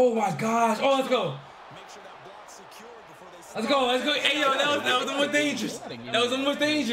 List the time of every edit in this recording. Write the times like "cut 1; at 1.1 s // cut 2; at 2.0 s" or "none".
none